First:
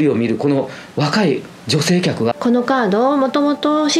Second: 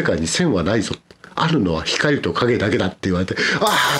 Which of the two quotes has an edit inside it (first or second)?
first